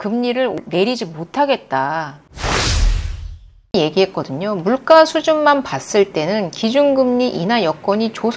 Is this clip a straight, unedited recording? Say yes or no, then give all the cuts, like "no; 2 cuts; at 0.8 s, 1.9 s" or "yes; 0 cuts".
no; 2 cuts; at 2.3 s, 3.7 s